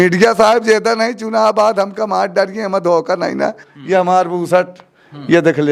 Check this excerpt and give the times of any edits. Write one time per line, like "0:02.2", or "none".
0:03.6

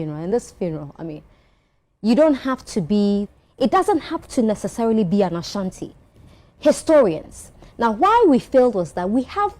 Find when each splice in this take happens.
0:03.4

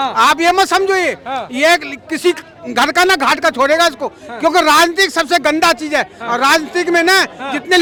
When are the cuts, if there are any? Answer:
none

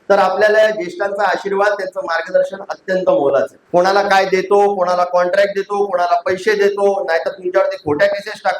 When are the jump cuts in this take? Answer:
0:03.6

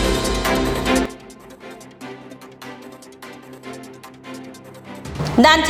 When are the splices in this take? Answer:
0:01.1
0:04.1

